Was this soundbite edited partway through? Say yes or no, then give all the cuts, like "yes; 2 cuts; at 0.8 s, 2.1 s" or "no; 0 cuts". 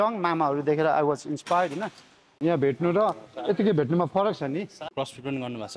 yes; 2 cuts; at 2.3 s, 4.8 s